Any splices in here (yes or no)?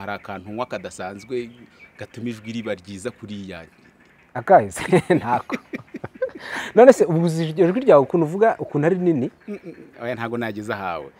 no